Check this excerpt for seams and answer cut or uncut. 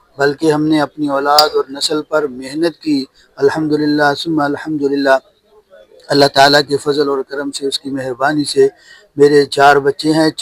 uncut